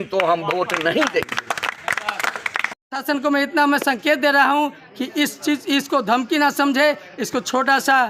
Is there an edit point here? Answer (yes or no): yes